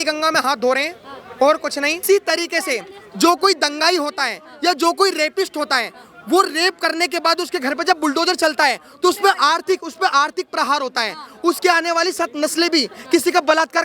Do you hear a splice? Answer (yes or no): yes